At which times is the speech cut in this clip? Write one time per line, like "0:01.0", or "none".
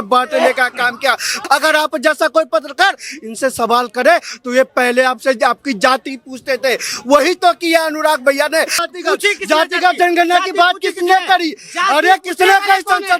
0:01.4
0:08.8